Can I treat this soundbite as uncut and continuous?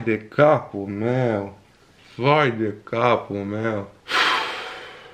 no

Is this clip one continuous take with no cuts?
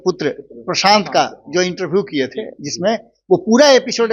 yes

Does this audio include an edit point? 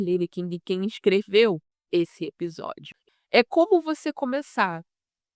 yes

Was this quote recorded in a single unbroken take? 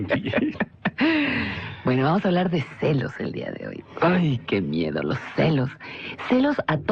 no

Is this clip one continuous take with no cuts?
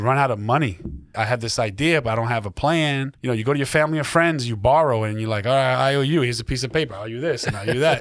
no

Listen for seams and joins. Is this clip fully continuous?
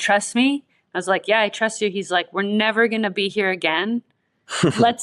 yes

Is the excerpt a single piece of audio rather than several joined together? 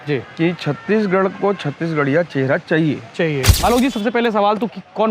no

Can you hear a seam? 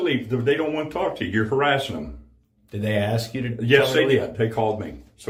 no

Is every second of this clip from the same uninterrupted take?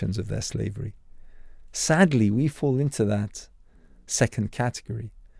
yes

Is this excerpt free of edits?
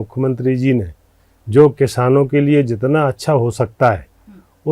yes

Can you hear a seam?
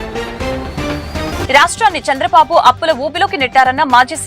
yes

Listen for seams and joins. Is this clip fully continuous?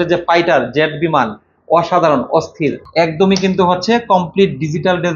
no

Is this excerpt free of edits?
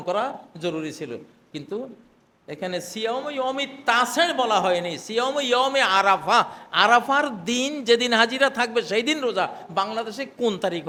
yes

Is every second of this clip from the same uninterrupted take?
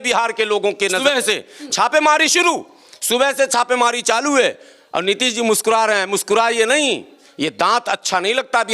no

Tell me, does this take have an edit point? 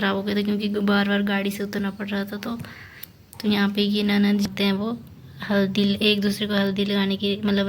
yes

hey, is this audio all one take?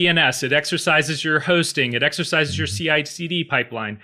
yes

